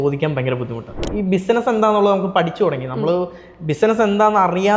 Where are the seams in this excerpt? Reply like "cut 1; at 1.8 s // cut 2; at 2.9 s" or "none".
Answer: cut 1; at 1.0 s